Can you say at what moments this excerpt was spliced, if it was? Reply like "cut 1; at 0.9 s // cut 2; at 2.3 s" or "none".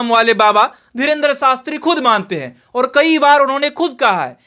none